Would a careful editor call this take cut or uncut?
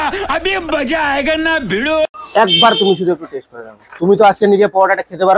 cut